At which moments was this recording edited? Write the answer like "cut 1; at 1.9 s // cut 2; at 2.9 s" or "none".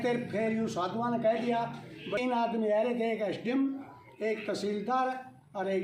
cut 1; at 2.2 s